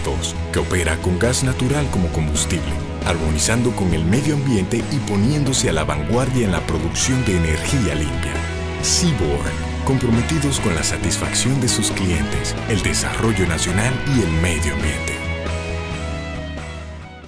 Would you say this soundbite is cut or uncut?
uncut